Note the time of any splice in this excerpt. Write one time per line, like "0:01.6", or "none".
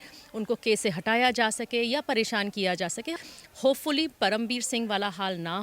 0:03.1